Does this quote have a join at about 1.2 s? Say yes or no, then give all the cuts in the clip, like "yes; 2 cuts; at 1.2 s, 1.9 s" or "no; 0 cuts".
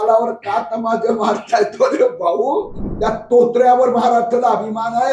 no; 1 cut; at 2.8 s